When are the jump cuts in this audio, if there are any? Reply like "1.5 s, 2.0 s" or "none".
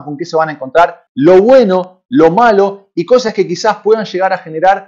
1.0 s